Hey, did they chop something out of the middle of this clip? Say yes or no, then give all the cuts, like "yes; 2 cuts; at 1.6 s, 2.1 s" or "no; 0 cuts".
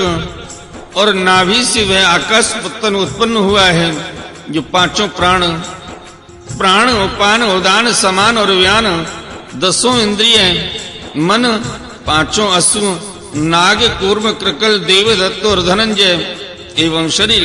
no; 0 cuts